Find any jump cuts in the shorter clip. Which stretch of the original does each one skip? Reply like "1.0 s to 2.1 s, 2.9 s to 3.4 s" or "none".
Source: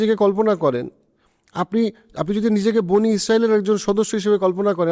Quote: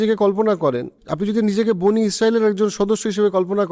1.0 s to 2.1 s